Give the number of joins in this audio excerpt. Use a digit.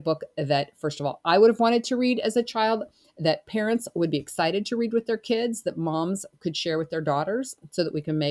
0